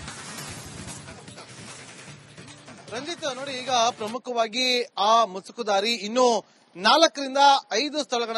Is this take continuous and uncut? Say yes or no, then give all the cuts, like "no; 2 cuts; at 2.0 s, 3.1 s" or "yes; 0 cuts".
no; 1 cut; at 1.1 s